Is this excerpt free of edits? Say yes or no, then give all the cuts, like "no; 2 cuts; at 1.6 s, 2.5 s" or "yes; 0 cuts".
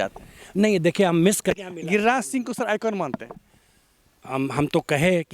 no; 1 cut; at 1.5 s